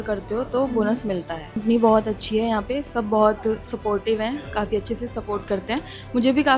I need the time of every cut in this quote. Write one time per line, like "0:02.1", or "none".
0:01.5